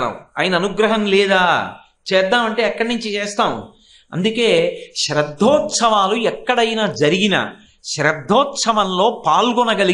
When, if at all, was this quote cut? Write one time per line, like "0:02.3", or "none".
none